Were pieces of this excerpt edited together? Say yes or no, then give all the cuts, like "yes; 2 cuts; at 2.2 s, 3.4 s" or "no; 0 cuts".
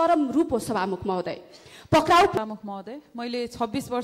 yes; 1 cut; at 2.3 s